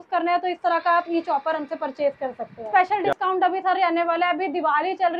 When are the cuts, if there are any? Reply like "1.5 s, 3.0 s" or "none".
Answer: 2.9 s